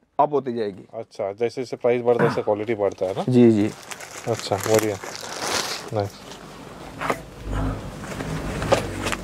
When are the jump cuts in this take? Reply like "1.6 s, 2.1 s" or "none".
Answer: none